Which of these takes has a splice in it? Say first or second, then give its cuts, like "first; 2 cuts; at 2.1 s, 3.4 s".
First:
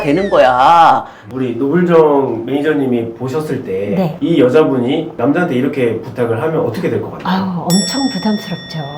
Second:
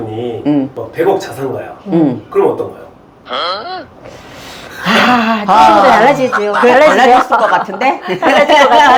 first; 1 cut; at 1.3 s